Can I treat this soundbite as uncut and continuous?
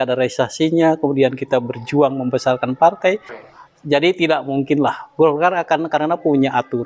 no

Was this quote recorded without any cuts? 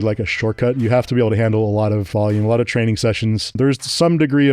no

